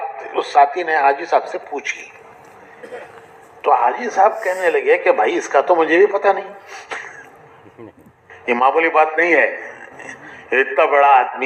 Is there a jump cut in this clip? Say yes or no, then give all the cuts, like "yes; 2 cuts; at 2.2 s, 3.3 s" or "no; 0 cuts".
no; 0 cuts